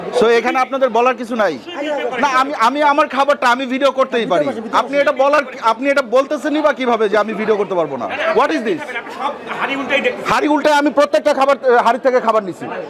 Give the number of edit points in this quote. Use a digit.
0